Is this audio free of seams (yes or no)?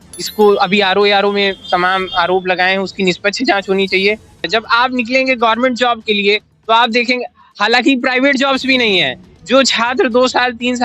no